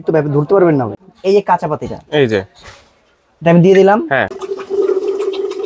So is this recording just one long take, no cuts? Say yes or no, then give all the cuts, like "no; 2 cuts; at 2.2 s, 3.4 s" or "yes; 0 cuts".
no; 2 cuts; at 0.9 s, 4.4 s